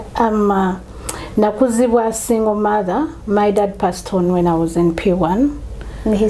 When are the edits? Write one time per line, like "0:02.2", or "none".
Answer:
none